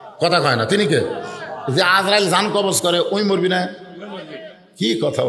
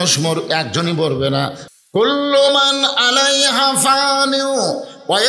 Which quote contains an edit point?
second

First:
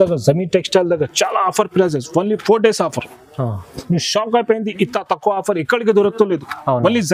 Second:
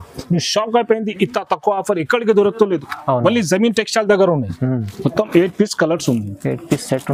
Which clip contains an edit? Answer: second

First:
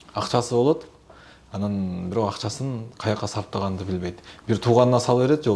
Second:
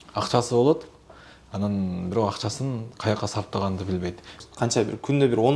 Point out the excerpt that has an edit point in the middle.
second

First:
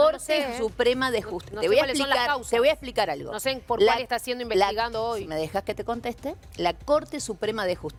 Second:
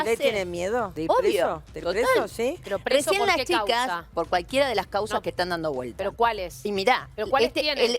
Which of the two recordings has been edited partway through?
second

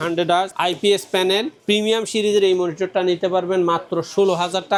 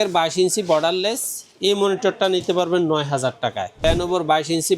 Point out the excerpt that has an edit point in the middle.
second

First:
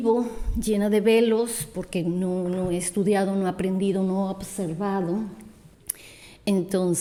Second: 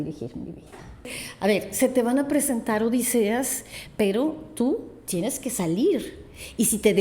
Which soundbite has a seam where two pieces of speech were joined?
second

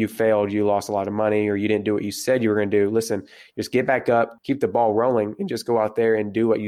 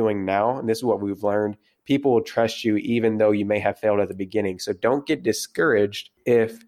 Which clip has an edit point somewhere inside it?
first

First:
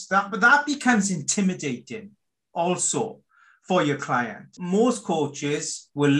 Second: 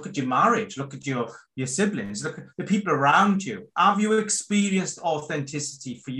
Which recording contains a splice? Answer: first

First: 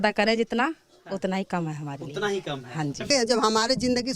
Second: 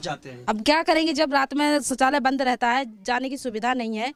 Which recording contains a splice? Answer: first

